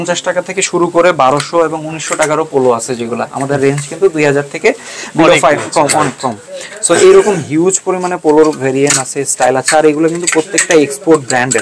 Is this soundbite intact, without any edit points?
yes; 0 cuts

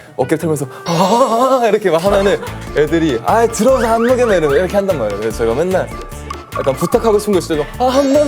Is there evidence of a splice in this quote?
no; 0 cuts

